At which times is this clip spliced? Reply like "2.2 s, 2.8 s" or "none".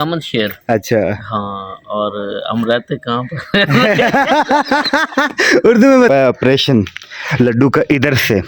6.1 s